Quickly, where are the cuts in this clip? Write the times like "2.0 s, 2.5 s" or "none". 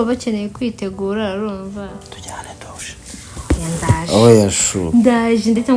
1.9 s